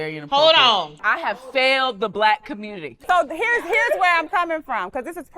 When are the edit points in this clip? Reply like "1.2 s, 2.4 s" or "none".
1.0 s, 2.9 s